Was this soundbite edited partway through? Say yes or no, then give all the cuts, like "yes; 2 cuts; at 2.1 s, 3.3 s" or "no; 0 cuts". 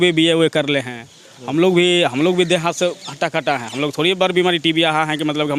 no; 0 cuts